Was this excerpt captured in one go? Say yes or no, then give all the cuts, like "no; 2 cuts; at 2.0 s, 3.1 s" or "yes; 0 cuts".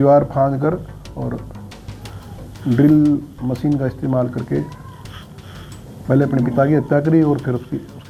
yes; 0 cuts